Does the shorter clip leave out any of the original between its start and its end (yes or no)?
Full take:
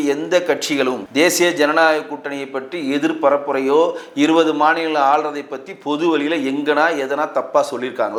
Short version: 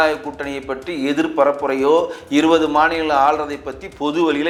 no